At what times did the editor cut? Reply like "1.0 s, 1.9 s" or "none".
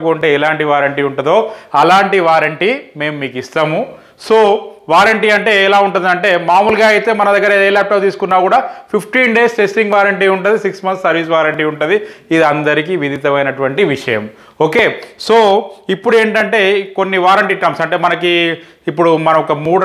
none